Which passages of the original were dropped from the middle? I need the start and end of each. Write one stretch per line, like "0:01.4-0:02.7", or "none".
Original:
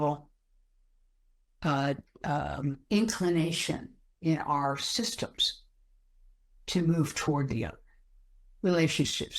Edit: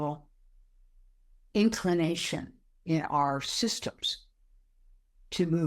0:01.4-0:02.8